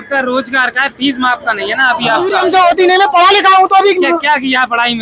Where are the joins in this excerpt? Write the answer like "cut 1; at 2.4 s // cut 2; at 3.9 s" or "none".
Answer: cut 1; at 2.4 s